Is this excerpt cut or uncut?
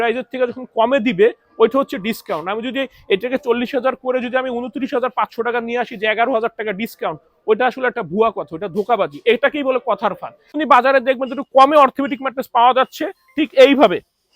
cut